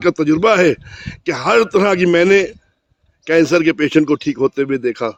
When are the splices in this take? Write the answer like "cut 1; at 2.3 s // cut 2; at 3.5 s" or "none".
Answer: none